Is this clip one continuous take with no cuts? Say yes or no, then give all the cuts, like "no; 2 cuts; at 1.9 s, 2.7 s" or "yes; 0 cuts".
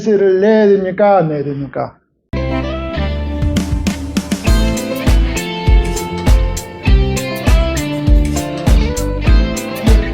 yes; 0 cuts